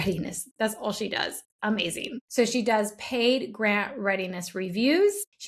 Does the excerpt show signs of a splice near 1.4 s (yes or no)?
no